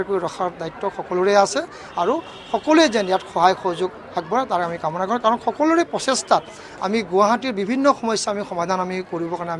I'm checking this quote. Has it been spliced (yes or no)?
no